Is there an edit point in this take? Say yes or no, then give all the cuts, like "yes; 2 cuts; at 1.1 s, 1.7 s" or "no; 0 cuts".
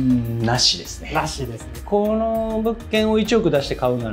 yes; 1 cut; at 1.7 s